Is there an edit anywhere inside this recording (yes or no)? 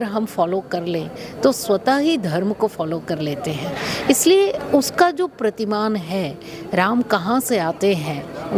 no